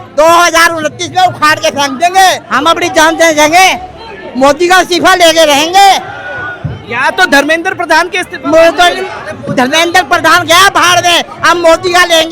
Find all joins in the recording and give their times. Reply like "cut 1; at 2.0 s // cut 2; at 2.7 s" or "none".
cut 1; at 2.5 s